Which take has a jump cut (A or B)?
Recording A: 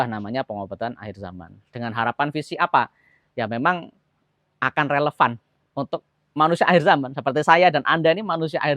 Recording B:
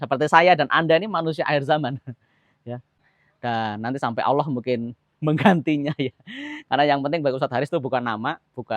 B